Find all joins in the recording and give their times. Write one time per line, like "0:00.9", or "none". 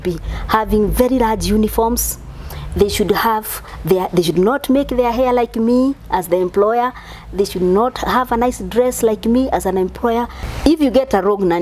0:10.4